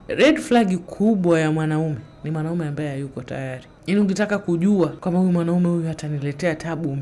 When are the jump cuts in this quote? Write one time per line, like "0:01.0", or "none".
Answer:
0:02.1
0:03.7
0:05.0